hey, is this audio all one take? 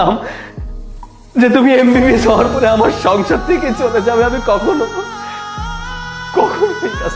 yes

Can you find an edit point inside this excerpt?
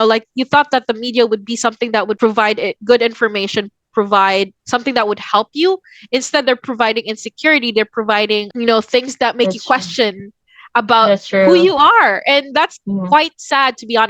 yes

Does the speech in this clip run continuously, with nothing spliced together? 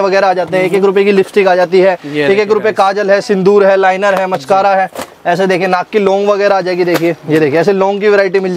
yes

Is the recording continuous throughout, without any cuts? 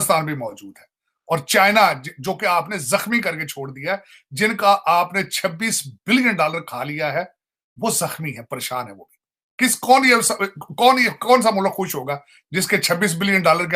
yes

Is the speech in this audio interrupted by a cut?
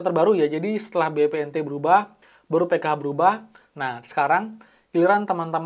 yes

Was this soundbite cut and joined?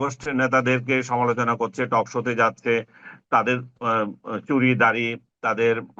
no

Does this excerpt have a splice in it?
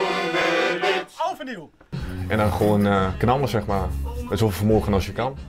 yes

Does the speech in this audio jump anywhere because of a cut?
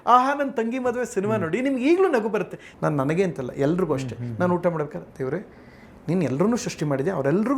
yes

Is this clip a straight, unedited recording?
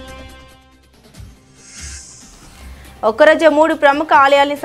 no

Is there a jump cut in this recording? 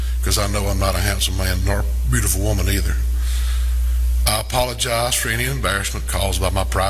no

